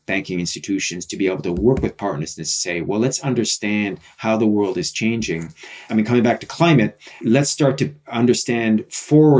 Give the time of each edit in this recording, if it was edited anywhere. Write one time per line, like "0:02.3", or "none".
0:05.8
0:07.2